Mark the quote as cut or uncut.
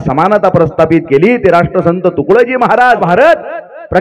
cut